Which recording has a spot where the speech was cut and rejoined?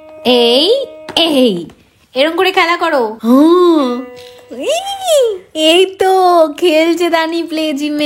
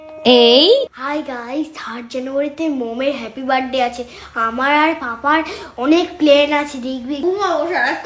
second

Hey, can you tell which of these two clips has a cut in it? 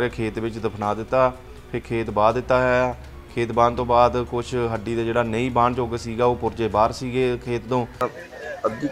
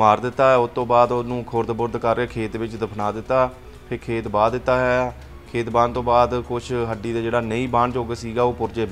first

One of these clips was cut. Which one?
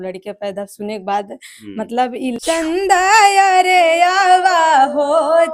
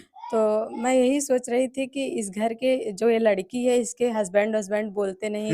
first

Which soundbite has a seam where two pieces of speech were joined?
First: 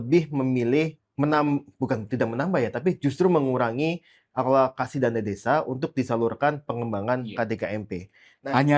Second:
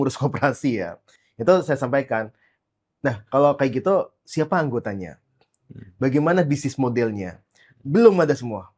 first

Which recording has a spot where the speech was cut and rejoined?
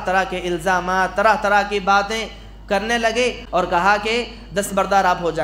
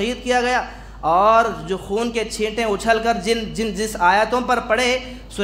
first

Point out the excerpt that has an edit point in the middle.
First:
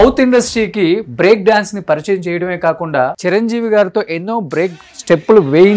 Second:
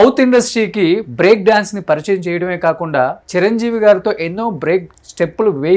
first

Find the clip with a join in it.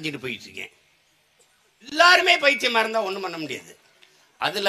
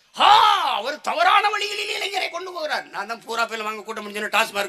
first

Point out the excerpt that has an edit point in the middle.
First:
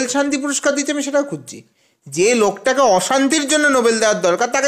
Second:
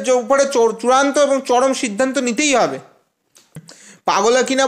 second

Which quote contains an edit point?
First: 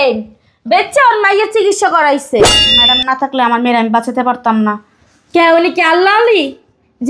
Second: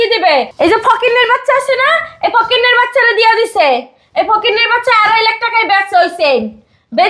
first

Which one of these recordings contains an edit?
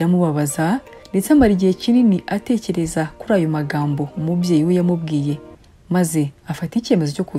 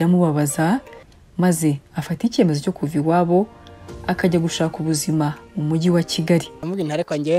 second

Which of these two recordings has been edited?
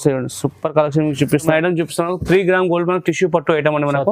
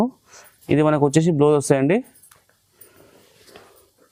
first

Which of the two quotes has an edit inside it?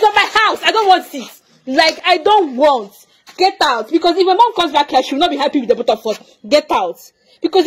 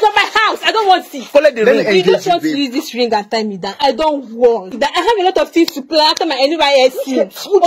second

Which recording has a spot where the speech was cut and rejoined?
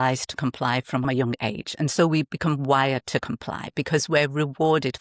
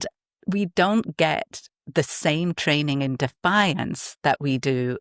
first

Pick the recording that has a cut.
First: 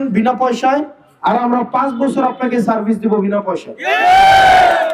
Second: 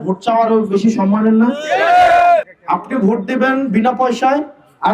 second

